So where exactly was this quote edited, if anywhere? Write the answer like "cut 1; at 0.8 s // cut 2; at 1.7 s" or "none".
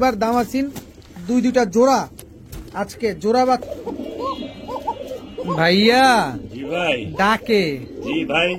cut 1; at 3.6 s